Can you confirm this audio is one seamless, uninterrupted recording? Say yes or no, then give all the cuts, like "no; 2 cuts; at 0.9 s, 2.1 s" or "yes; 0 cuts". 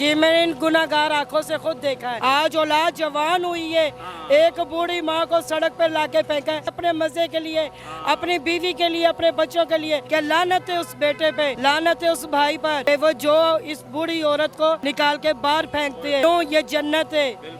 no; 7 cuts; at 2.1 s, 6.8 s, 10.0 s, 11.6 s, 12.8 s, 14.9 s, 16.2 s